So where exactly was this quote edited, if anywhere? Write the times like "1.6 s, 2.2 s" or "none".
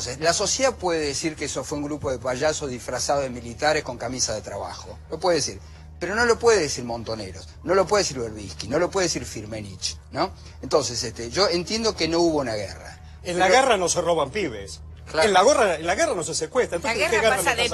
16.1 s